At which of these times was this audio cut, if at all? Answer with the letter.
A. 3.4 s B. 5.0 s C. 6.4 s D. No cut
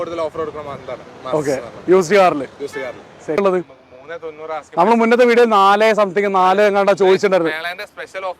A